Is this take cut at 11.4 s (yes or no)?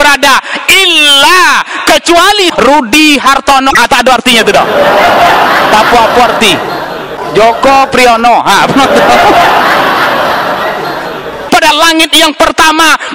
yes